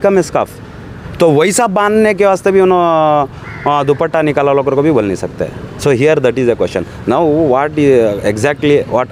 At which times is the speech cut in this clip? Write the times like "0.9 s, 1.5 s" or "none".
none